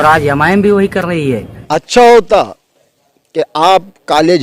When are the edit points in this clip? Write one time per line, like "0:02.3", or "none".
0:01.5